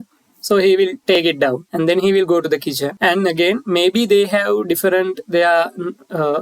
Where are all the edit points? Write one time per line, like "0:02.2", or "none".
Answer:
0:01.2
0:02.9